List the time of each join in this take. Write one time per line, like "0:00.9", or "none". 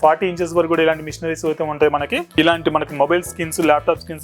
0:02.3